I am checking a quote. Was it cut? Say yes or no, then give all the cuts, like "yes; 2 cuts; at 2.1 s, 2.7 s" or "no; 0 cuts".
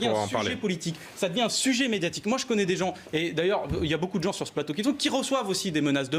no; 0 cuts